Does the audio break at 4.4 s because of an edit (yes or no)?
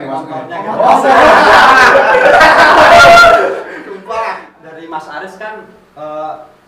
yes